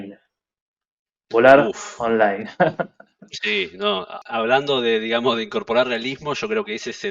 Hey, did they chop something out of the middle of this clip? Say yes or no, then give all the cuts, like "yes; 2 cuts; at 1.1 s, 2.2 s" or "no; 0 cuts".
yes; 1 cut; at 4.2 s